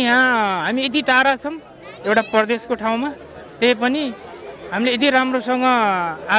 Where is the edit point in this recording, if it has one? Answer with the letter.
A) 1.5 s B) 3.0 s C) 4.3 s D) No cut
D